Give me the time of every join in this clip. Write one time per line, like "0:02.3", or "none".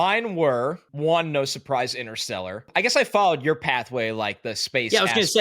0:00.9
0:02.7